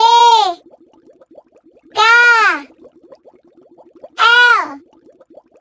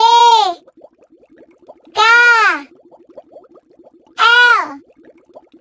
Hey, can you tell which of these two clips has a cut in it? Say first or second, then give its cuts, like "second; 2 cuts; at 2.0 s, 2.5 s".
second; 2 cuts; at 2.7 s, 4.1 s